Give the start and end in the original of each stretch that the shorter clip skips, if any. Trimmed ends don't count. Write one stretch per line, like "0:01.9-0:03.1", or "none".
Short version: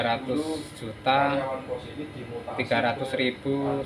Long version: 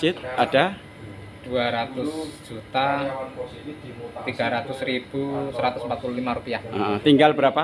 none